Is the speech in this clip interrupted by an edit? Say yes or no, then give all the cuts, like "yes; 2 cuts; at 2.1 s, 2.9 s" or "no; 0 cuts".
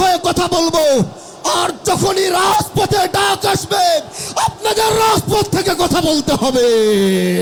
no; 0 cuts